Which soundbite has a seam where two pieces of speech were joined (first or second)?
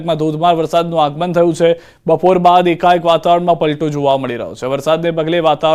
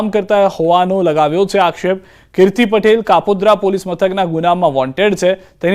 second